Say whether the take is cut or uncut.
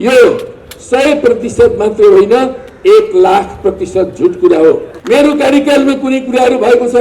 cut